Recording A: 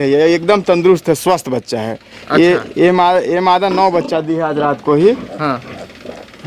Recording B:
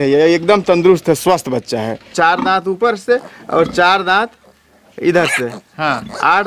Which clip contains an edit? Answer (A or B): B